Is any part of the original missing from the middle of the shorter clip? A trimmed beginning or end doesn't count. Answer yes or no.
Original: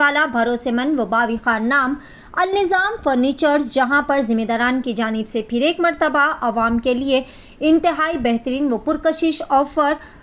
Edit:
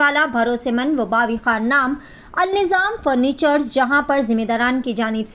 no